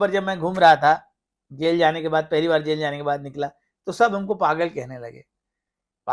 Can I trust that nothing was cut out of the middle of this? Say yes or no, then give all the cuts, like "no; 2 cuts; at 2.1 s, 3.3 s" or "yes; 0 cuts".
yes; 0 cuts